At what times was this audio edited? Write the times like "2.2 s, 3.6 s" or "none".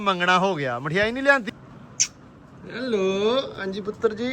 1.5 s